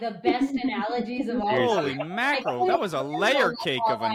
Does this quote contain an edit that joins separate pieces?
no; 0 cuts

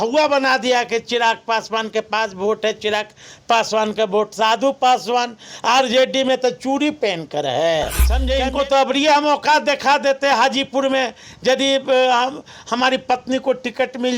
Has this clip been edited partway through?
yes; 1 cut; at 8.1 s

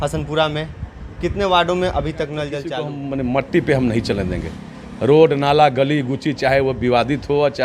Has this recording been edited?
yes; 1 cut; at 2.7 s

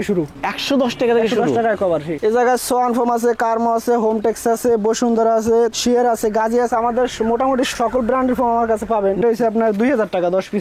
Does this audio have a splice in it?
yes; 3 cuts; at 2.1 s, 5.7 s, 9.2 s

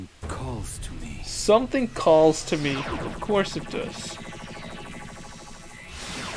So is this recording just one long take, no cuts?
yes; 0 cuts

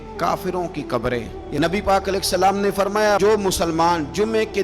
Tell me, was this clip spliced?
yes; 1 cut; at 1.4 s

